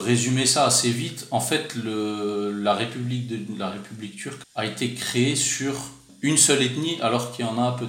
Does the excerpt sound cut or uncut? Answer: cut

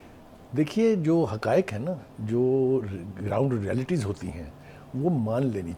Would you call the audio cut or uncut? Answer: uncut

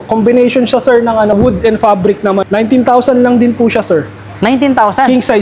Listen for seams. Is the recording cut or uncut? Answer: cut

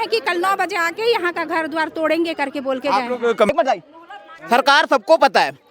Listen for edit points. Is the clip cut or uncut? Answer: cut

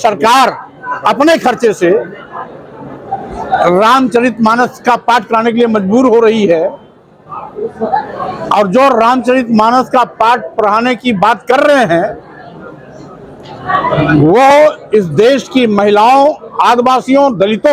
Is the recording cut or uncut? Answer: uncut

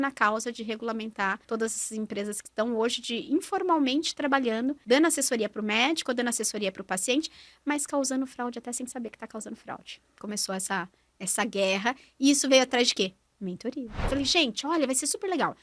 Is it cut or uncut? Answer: cut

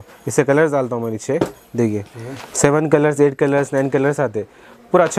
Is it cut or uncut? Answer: uncut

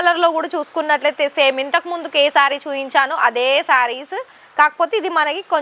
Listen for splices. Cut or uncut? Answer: uncut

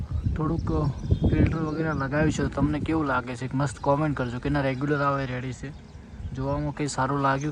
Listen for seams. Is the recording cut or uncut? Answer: uncut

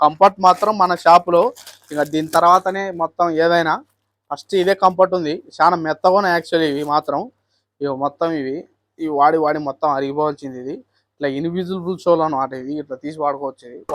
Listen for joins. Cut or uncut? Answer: uncut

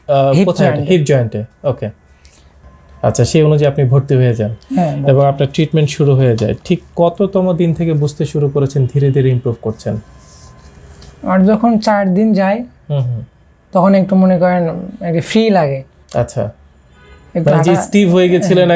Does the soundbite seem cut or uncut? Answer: cut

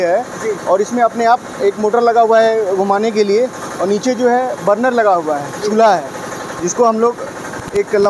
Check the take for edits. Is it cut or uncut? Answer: uncut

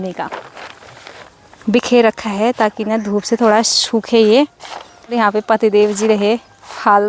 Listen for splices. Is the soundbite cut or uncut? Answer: cut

